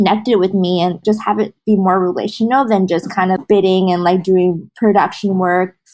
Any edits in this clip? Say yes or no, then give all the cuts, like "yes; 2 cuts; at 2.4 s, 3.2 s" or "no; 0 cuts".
yes; 3 cuts; at 1.0 s, 3.4 s, 4.7 s